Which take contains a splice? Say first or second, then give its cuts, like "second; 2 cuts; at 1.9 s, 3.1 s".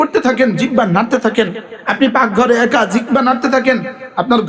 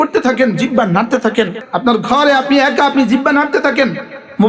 second; 1 cut; at 1.6 s